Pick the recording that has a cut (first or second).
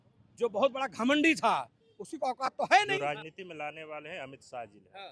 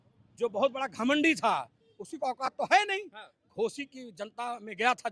first